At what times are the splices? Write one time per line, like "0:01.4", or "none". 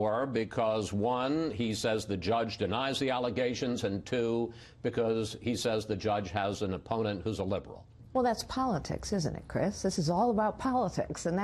0:03.6